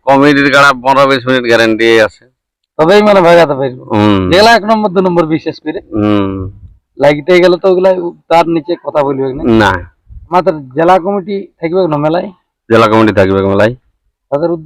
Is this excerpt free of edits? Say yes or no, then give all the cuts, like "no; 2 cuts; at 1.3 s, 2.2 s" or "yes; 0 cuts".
yes; 0 cuts